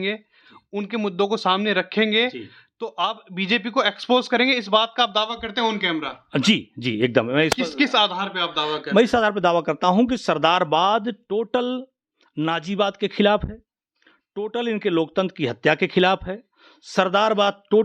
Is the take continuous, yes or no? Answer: yes